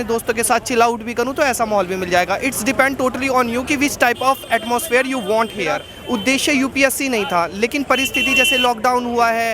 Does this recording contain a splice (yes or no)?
yes